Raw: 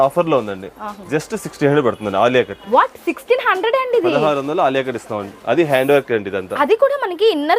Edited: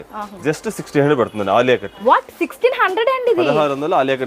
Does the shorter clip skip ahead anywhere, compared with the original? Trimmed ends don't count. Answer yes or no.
no